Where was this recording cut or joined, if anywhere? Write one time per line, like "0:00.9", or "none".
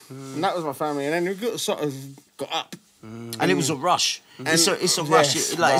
0:02.2